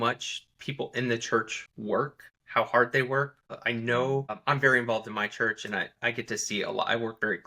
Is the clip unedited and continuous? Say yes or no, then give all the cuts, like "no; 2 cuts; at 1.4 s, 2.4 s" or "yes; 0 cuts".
no; 4 cuts; at 1.9 s, 3.4 s, 4.4 s, 5.9 s